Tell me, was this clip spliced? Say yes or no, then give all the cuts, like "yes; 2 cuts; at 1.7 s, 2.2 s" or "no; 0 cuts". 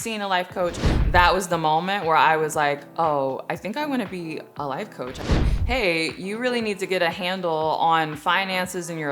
yes; 2 cuts; at 1.0 s, 5.5 s